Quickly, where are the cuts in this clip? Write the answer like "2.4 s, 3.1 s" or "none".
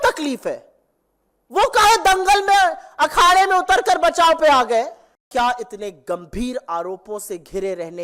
5.2 s